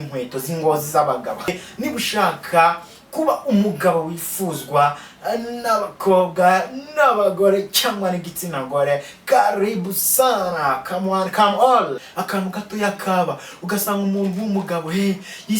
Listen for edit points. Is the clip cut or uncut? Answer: cut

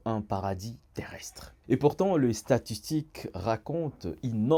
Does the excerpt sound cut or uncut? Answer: uncut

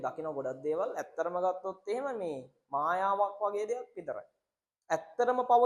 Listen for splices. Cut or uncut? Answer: uncut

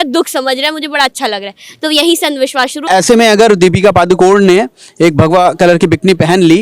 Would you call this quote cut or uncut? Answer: cut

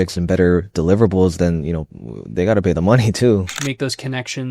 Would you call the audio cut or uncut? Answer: cut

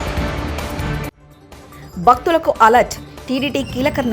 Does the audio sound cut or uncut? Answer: cut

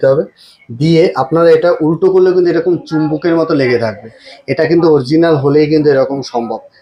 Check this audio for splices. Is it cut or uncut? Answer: uncut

